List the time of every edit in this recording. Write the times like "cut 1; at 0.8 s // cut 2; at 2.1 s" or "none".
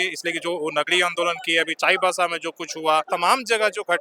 cut 1; at 3.1 s